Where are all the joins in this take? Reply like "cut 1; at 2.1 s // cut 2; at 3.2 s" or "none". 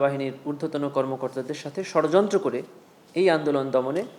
none